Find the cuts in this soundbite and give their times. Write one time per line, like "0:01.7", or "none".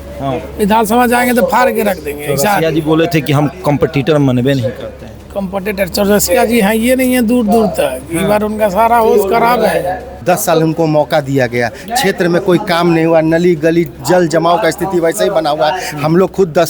0:10.1